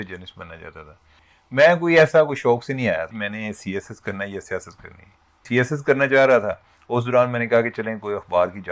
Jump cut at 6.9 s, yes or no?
no